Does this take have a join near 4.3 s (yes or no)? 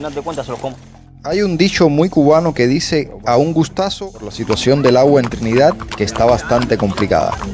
yes